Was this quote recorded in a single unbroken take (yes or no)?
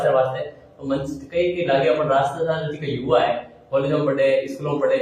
yes